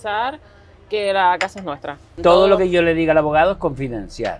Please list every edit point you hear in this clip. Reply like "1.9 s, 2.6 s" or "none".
2.2 s

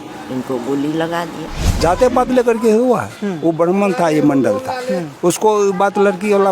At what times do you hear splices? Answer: 1.8 s

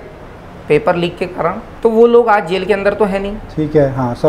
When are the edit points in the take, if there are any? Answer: 1.7 s

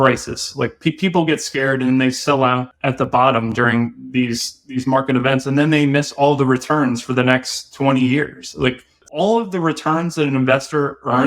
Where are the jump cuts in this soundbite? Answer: 2.8 s, 8.9 s

